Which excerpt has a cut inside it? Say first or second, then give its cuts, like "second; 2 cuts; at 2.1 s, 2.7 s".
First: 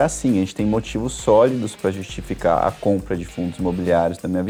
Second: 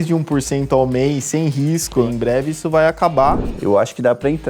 second; 2 cuts; at 2.1 s, 3.5 s